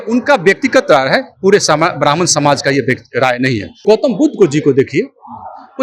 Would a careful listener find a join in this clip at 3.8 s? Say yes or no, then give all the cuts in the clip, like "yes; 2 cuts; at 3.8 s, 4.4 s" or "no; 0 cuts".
yes; 1 cut; at 3.8 s